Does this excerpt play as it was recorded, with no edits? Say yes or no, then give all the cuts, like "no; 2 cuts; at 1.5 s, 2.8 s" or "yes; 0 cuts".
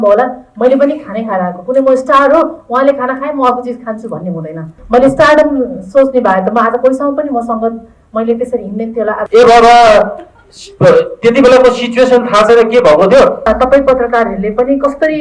no; 3 cuts; at 4.7 s, 9.2 s, 13.5 s